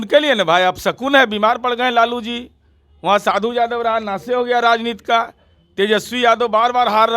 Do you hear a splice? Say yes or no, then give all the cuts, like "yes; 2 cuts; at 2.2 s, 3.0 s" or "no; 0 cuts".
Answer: no; 0 cuts